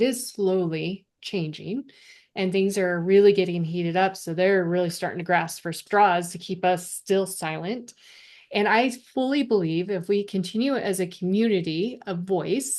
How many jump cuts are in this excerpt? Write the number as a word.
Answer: two